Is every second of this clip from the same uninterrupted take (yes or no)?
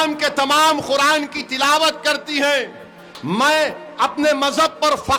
yes